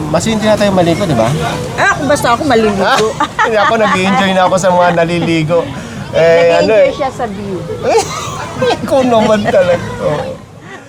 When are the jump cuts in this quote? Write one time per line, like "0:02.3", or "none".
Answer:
none